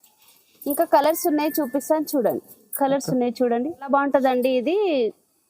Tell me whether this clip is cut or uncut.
cut